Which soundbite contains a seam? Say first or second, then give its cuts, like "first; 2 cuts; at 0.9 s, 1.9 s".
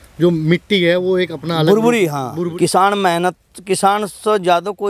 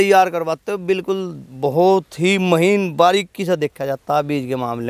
first; 1 cut; at 2.5 s